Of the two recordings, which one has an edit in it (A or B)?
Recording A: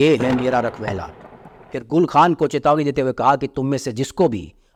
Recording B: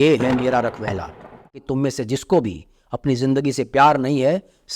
B